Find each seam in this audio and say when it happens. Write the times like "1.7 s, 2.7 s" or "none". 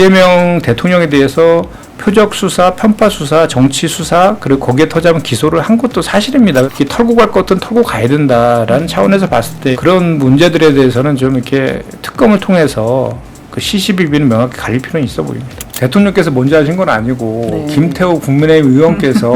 6.7 s, 15.7 s